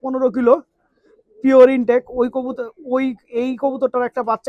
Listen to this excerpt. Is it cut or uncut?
uncut